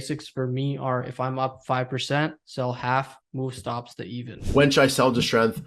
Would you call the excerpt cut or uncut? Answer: cut